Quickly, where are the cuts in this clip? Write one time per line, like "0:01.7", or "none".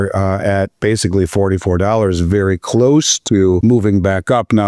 0:03.6